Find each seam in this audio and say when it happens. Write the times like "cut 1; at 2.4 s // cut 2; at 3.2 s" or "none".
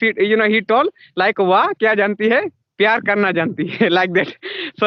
none